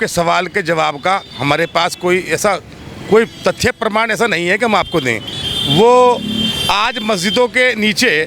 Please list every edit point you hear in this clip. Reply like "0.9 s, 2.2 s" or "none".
none